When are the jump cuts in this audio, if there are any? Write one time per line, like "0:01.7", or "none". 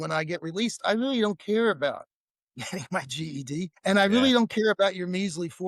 0:03.7